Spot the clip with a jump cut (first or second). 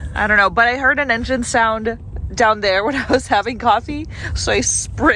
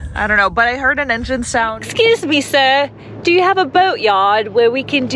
second